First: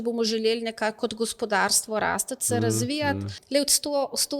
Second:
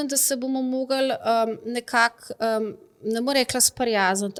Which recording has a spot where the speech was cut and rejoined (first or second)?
first